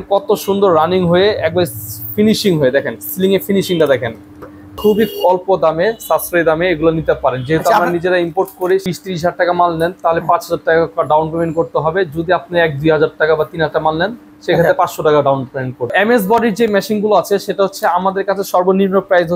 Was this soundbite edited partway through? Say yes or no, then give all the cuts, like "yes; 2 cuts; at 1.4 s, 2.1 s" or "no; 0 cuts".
yes; 3 cuts; at 4.7 s, 8.8 s, 15.9 s